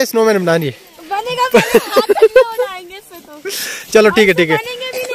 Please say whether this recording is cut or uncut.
uncut